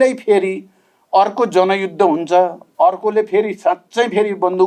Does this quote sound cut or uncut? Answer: cut